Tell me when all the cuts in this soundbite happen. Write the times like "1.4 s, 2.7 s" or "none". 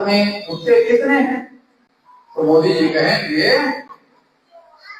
none